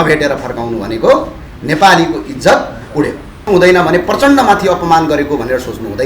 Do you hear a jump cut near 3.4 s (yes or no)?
yes